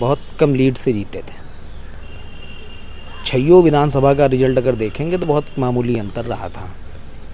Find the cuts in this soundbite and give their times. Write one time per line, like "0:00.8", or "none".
none